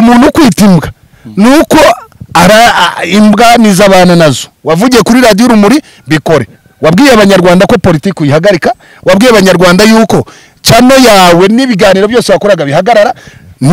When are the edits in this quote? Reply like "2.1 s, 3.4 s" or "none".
4.5 s